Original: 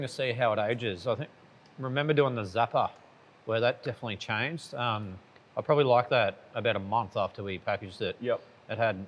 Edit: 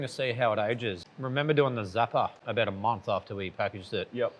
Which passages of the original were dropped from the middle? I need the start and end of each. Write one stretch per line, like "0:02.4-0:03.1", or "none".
0:01.0-0:01.6
0:03.0-0:06.5